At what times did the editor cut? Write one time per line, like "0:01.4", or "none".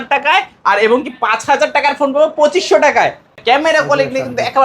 0:03.4